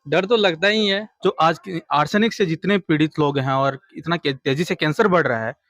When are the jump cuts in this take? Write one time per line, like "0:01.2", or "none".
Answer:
0:01.1